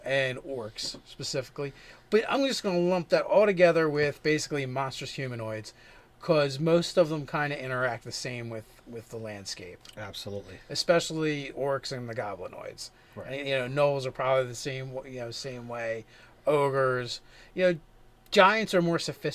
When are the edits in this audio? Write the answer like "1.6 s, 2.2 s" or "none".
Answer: none